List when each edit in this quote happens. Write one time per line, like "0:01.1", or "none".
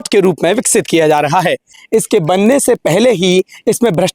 0:01.8